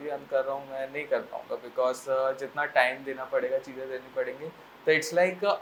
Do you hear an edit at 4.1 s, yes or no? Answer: no